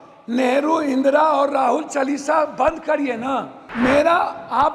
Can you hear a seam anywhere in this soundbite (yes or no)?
yes